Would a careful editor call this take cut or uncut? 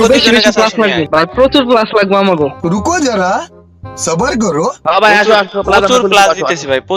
cut